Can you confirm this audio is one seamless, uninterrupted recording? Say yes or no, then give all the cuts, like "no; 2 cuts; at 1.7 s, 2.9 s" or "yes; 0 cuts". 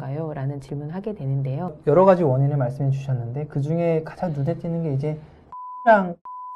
no; 1 cut; at 1.8 s